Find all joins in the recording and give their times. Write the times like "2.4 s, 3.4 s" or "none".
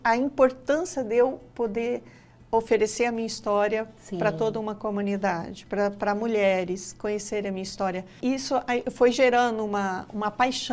8.1 s